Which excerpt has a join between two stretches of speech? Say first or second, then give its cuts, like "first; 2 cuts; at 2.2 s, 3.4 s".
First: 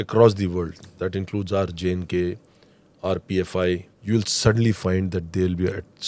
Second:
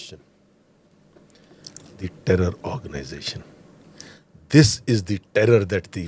first; 1 cut; at 3.9 s